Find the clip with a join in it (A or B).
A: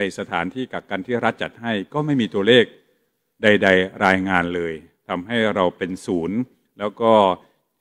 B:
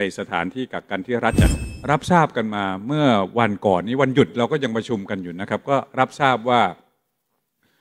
B